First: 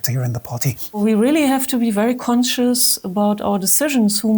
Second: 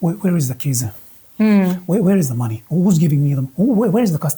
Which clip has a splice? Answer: first; 1 cut; at 1.0 s

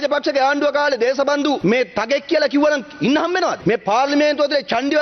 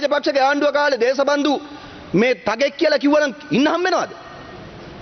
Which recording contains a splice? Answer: first; 2 cuts; at 1.6 s, 3.6 s

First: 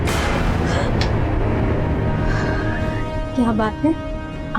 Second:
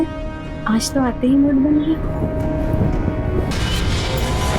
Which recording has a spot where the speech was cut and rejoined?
second; 1 cut; at 3.5 s

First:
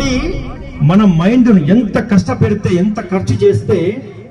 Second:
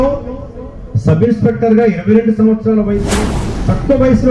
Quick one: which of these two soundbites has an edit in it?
second; 1 cut; at 3.2 s

